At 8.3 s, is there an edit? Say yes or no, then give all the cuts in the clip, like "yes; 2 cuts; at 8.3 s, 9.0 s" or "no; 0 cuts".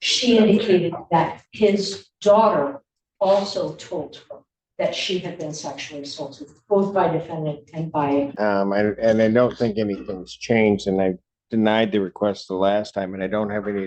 yes; 1 cut; at 8.3 s